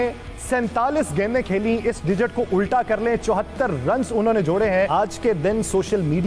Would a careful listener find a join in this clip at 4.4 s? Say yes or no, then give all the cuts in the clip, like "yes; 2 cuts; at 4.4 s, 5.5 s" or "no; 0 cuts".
no; 0 cuts